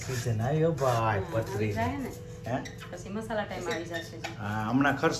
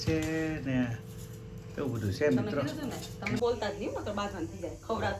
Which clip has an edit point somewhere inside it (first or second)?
second